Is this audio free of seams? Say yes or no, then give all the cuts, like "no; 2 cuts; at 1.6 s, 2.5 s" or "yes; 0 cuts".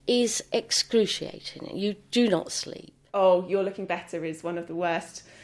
no; 1 cut; at 3.0 s